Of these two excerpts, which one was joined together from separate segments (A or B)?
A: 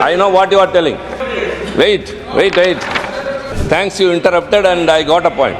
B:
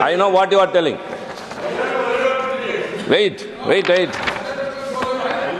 A